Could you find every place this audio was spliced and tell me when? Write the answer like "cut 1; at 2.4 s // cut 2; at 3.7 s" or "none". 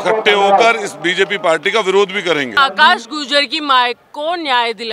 cut 1; at 2.5 s